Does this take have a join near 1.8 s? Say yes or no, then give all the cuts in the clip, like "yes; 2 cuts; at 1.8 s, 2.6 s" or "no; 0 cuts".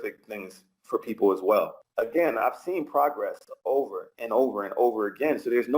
yes; 1 cut; at 1.8 s